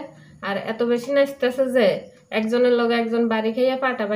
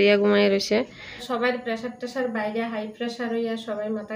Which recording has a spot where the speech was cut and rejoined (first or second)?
second